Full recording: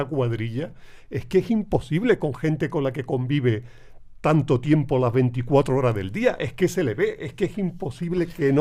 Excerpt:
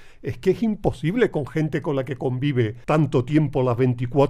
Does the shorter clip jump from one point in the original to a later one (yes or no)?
yes